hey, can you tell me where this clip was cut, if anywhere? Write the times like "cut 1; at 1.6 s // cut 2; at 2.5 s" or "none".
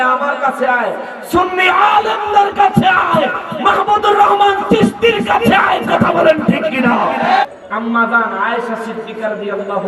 cut 1; at 7.4 s